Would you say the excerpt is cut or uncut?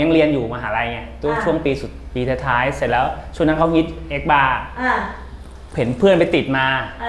uncut